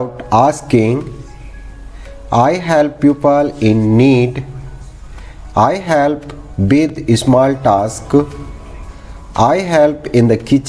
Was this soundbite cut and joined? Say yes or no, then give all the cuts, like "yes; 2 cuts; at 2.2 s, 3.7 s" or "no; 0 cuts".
no; 0 cuts